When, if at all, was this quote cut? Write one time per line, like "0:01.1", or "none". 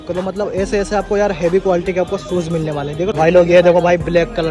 0:03.1